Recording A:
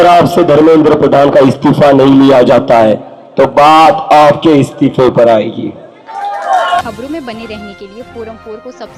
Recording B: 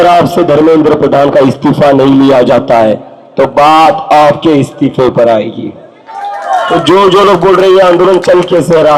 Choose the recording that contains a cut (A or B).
B